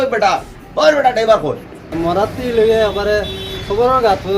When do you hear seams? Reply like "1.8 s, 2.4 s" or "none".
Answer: 1.9 s